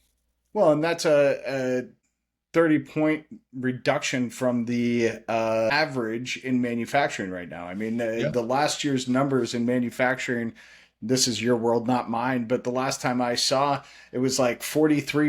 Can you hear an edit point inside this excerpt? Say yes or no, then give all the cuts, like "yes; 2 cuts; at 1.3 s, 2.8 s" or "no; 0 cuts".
yes; 2 cuts; at 2.0 s, 5.7 s